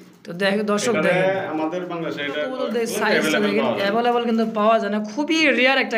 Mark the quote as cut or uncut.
cut